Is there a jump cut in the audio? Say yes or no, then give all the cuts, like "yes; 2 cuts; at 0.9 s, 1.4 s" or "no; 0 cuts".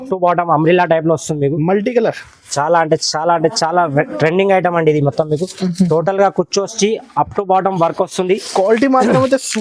no; 0 cuts